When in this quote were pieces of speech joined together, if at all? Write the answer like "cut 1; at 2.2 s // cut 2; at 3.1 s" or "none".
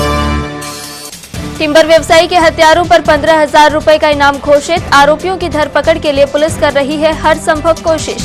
cut 1; at 0.9 s